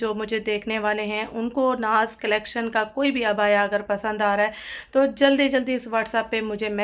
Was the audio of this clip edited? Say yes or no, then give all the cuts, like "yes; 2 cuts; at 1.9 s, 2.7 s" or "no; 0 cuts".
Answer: no; 0 cuts